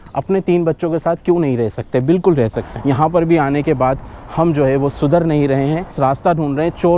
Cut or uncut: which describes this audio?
cut